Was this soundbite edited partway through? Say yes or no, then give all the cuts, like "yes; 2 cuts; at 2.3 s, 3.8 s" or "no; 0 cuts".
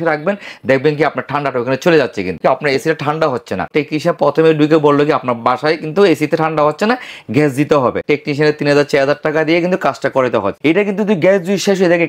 yes; 4 cuts; at 2.4 s, 3.7 s, 8.0 s, 10.5 s